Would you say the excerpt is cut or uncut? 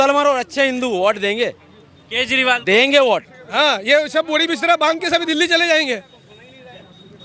cut